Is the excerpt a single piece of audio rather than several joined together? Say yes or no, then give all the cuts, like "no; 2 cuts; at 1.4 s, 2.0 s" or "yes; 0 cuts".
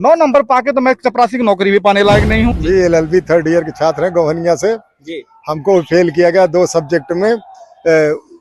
no; 1 cut; at 2.6 s